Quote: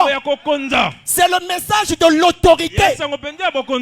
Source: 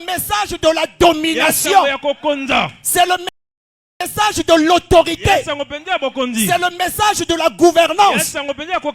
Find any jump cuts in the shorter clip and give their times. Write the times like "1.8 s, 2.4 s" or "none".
1.5 s